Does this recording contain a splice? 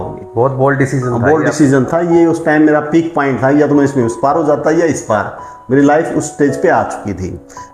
no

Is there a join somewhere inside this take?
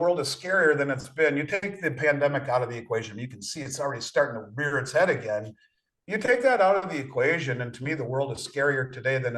no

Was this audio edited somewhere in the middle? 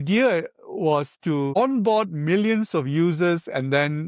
no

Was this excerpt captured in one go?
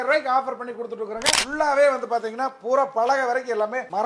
no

